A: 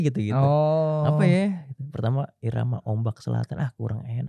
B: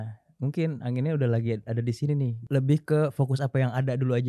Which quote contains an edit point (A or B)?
B